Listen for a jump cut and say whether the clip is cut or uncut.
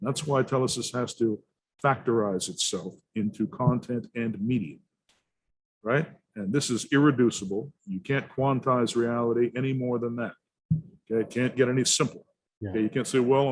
uncut